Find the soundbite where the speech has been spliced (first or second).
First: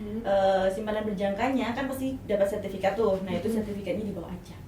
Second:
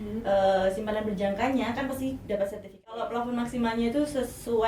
second